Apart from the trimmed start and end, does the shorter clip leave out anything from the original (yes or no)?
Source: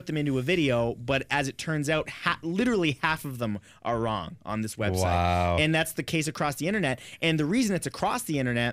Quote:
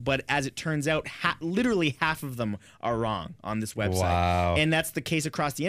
no